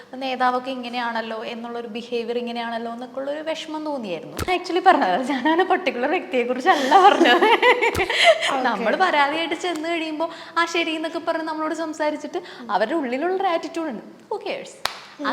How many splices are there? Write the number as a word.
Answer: one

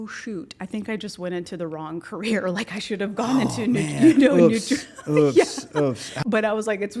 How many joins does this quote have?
one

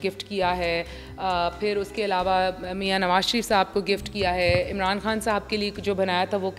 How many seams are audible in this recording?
zero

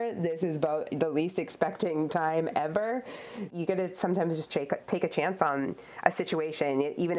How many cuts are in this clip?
one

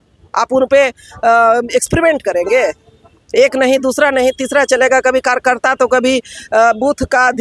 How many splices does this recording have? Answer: zero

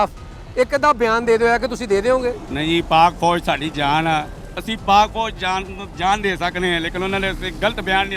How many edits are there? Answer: zero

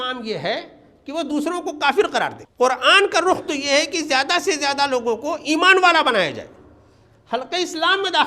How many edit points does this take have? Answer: one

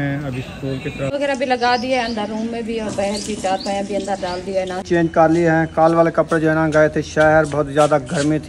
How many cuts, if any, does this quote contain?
two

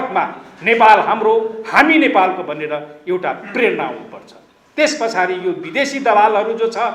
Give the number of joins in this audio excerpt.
zero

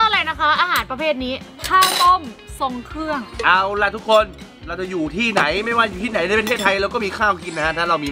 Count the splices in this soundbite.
one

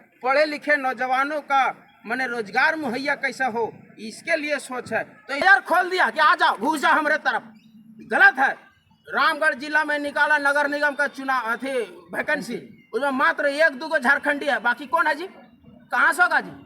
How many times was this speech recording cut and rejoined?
one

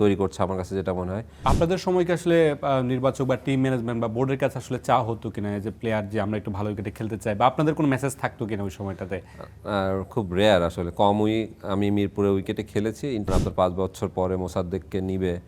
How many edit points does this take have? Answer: two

